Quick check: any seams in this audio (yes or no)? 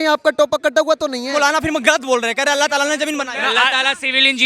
yes